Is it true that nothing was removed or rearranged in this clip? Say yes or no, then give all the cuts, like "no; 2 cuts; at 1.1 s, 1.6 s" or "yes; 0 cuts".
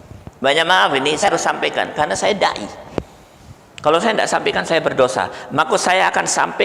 no; 1 cut; at 1.3 s